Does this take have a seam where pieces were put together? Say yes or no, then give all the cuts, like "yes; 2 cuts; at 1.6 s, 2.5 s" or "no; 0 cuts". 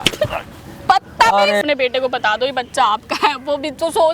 yes; 1 cut; at 1.6 s